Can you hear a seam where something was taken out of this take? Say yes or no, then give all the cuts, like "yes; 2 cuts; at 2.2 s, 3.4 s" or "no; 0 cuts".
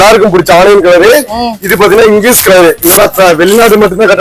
no; 0 cuts